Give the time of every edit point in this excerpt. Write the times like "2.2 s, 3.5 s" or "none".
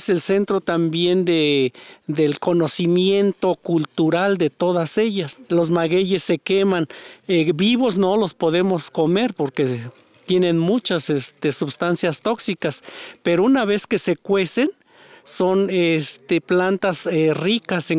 5.3 s

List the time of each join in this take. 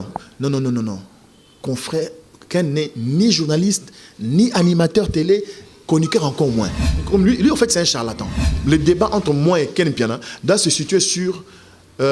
6.9 s, 8.5 s

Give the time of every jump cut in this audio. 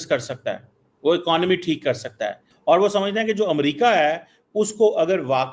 2.5 s

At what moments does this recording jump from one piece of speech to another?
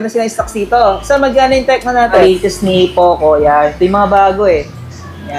2.2 s

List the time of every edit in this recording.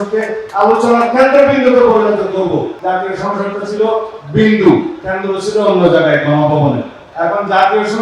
2.8 s, 7.0 s

